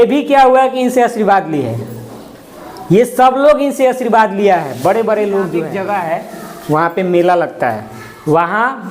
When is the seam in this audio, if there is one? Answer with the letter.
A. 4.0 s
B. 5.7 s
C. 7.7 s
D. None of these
B